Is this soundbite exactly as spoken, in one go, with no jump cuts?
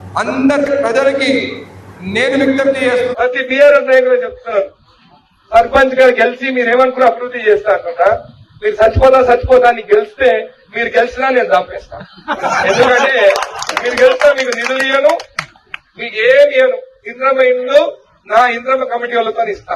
no; 1 cut; at 3.1 s

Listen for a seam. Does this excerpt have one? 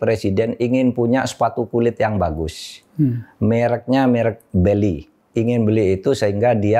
yes; 1 cut; at 5.1 s

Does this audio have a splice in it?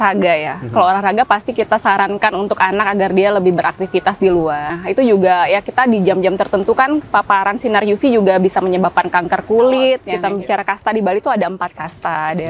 yes; 2 cuts; at 4.7 s, 10.1 s

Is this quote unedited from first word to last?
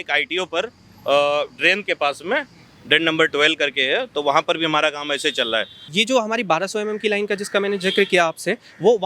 no; 1 cut; at 5.8 s

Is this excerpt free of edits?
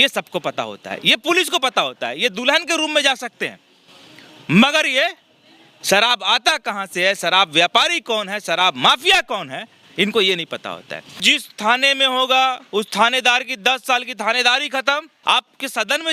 no; 2 cuts; at 11.2 s, 15.1 s

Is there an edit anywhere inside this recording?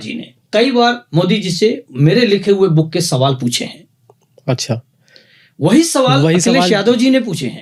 no; 0 cuts

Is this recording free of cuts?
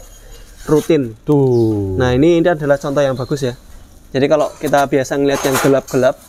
yes; 0 cuts

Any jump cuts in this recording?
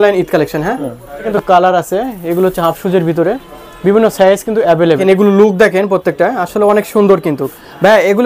yes; 2 cuts; at 1.3 s, 5.0 s

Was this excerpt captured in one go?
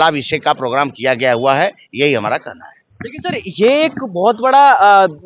yes; 0 cuts

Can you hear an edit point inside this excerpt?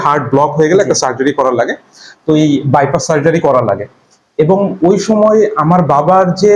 no; 0 cuts

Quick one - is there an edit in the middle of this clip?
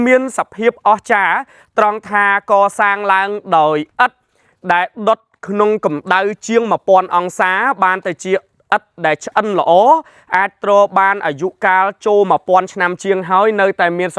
no; 0 cuts

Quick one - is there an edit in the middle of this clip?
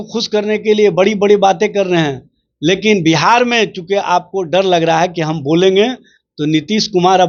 no; 0 cuts

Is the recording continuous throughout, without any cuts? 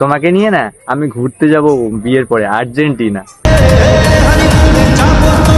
yes; 0 cuts

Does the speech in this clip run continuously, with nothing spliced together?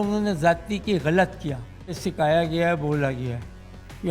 no; 1 cut; at 2.0 s

